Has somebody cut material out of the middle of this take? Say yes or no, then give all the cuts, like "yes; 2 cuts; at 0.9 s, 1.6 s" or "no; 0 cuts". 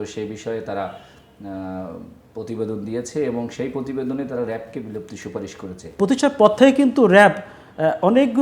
yes; 1 cut; at 6.0 s